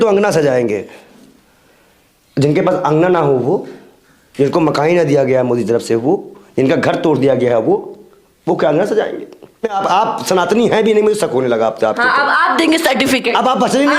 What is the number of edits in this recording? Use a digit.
1